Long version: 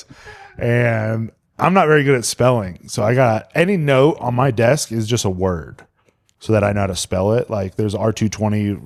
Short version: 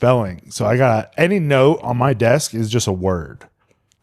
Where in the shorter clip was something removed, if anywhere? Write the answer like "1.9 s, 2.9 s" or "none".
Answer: none